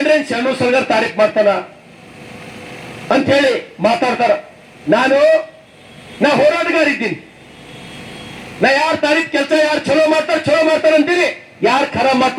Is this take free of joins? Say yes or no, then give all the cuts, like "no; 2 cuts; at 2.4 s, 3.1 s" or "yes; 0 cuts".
yes; 0 cuts